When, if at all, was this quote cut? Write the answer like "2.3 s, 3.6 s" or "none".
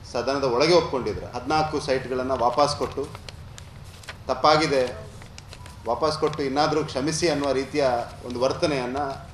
1.3 s

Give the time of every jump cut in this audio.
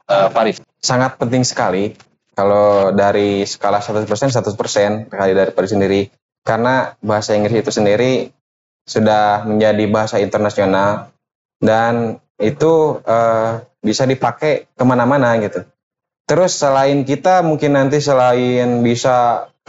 none

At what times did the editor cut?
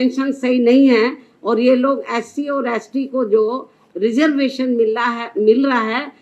none

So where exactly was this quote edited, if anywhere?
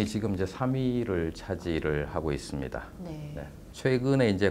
3.6 s

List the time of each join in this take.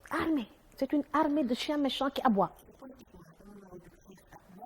2.7 s

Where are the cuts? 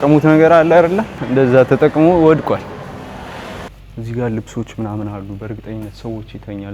1.1 s, 3.7 s

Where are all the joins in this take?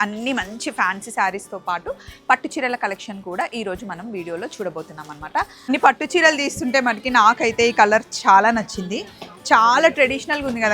5.7 s

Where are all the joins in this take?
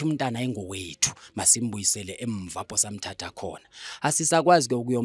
none

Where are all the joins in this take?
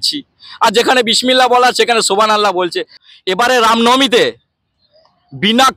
2.9 s

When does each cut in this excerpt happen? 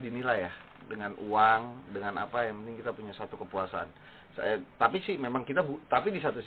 none

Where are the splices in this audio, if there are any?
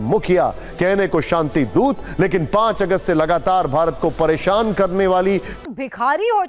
5.5 s

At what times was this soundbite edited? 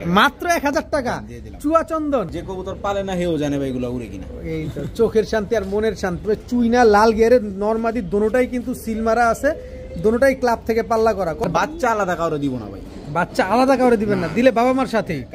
2.4 s, 6.2 s, 11.4 s

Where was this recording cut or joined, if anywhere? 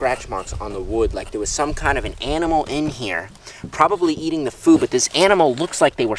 none

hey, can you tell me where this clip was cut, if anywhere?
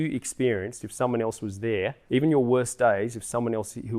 2.0 s

